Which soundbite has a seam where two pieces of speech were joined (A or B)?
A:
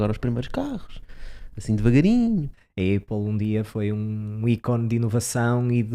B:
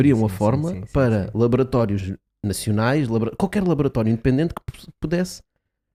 A